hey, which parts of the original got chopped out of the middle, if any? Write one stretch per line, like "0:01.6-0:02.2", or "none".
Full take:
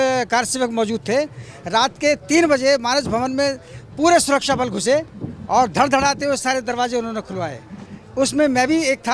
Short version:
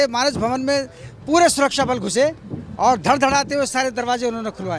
none